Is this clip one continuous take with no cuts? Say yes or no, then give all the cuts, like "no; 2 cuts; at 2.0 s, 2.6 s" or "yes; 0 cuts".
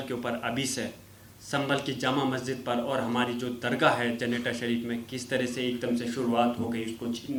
yes; 0 cuts